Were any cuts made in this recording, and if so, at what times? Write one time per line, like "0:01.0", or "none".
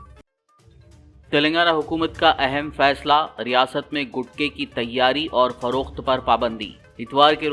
0:00.9

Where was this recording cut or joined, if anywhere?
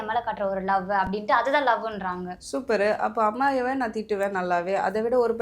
none

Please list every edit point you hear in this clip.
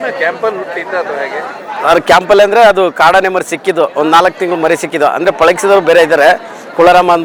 none

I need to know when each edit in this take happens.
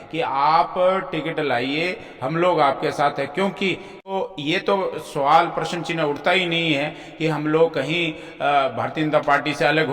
0:04.1

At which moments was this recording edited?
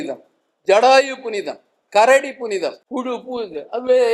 0:02.8

